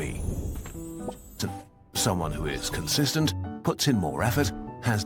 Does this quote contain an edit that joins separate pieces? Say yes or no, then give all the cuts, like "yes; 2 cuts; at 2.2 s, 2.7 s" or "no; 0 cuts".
yes; 1 cut; at 1.4 s